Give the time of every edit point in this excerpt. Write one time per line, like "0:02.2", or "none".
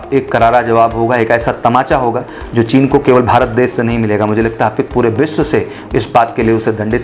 none